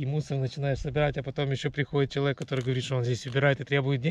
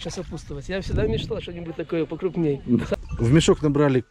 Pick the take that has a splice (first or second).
second